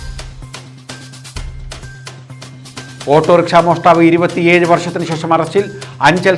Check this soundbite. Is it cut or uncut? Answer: cut